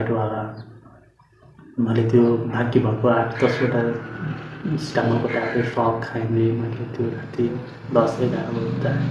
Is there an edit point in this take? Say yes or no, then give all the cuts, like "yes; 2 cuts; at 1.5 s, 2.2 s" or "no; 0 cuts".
no; 0 cuts